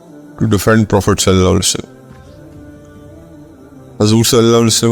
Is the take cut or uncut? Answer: cut